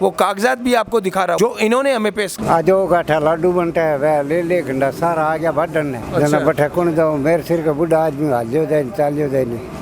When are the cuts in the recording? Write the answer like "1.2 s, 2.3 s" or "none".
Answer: 2.4 s